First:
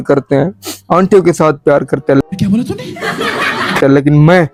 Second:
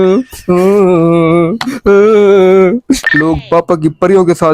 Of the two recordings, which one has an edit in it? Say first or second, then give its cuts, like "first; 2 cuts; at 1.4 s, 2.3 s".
second; 1 cut; at 3.1 s